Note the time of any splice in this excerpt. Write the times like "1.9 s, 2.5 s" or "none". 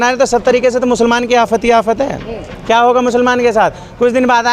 none